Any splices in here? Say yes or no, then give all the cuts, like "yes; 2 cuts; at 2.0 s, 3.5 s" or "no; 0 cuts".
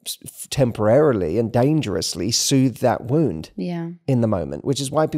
yes; 1 cut; at 3.5 s